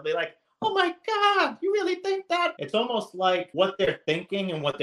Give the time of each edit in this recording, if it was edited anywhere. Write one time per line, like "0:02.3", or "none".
0:02.5
0:03.5